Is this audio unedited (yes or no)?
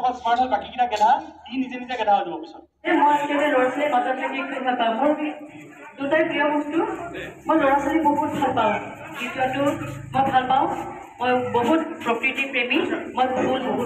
no